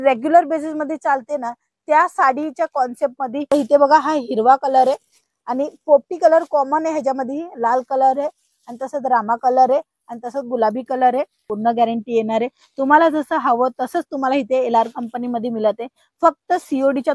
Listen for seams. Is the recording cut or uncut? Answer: cut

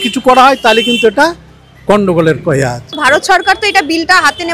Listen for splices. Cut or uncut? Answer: cut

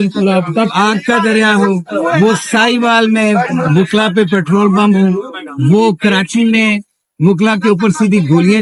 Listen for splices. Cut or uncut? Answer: uncut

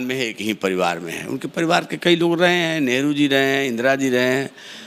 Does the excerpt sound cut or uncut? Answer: uncut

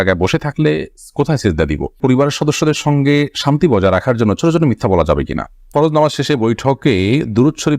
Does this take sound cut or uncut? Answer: cut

